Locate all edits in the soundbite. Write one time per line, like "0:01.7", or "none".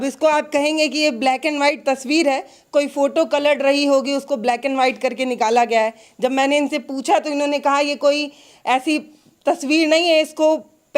none